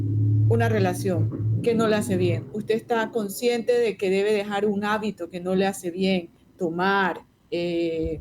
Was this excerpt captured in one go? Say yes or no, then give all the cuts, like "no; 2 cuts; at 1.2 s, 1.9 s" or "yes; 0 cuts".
no; 2 cuts; at 6.4 s, 7.3 s